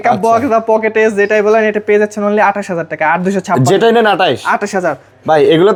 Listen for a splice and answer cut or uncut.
uncut